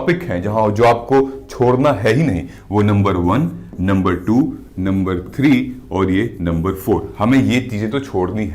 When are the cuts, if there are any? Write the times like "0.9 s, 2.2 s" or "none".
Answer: none